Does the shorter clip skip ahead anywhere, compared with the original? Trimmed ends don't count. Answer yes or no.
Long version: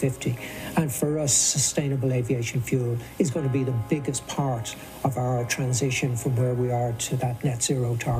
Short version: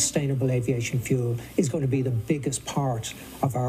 no